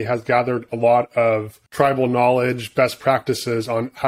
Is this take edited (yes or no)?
yes